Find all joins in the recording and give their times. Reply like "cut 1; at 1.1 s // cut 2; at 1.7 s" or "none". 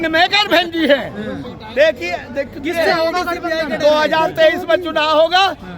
none